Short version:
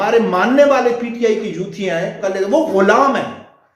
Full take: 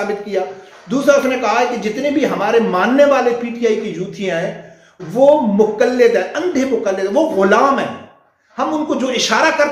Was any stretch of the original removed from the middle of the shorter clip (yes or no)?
yes